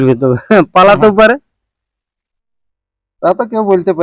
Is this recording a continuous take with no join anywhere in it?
yes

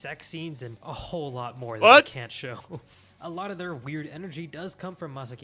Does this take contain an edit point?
no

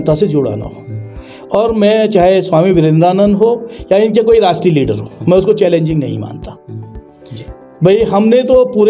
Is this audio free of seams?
yes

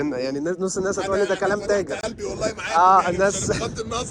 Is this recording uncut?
yes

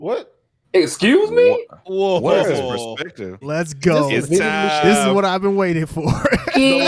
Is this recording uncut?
no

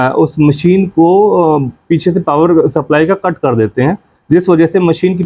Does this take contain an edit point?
no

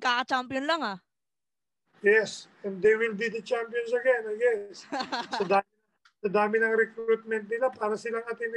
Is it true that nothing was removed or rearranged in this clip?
yes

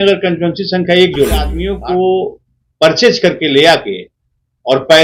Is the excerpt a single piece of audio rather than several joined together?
no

